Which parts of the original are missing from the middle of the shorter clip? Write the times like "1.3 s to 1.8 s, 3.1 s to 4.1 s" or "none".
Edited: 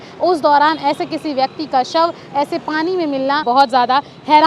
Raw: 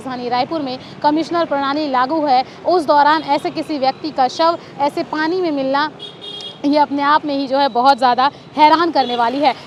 5.9 s to 7.7 s